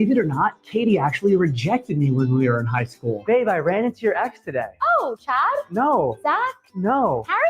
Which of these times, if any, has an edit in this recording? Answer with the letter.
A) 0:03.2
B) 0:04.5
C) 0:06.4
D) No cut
A